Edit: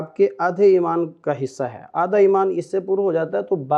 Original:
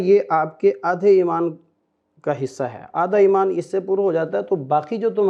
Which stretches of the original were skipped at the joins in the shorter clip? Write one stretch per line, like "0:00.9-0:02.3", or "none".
0:01.6-0:02.2